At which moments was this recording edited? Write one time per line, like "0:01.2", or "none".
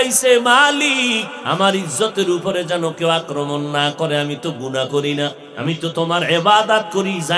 0:01.3
0:05.5

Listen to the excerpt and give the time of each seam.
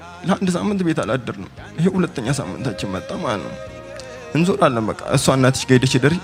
none

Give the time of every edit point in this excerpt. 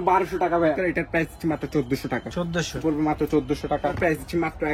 0:00.8
0:02.8
0:04.0

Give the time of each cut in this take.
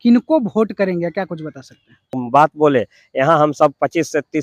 0:02.1

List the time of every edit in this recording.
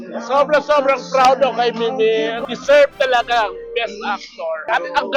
none

